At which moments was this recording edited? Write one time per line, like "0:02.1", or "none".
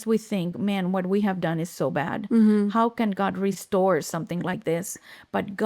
0:03.6